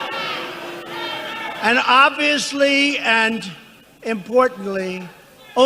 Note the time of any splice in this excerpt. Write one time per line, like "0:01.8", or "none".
0:02.7